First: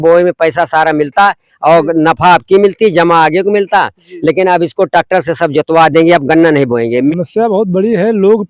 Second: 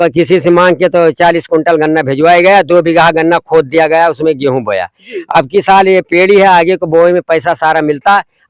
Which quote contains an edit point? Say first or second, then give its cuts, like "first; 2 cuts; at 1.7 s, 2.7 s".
first; 1 cut; at 7.1 s